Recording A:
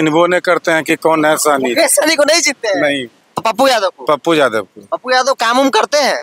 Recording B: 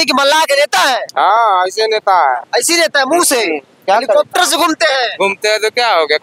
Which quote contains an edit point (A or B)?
A